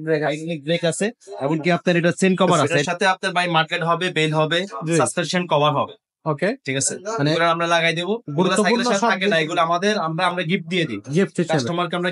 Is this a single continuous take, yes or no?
no